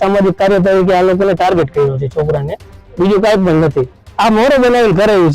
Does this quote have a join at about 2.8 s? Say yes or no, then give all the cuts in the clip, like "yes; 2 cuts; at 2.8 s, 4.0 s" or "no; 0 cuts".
no; 1 cut; at 4.0 s